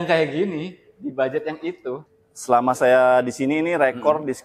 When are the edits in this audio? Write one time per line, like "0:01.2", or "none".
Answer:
0:02.1